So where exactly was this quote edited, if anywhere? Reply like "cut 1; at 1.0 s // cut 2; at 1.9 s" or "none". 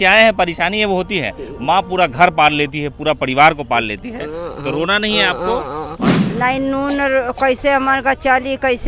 cut 1; at 6.2 s